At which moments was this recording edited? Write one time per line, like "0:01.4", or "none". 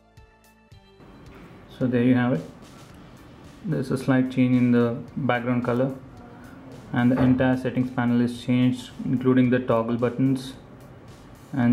0:05.1